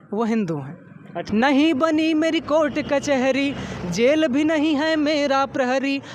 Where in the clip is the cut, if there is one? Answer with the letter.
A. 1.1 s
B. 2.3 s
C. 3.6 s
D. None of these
A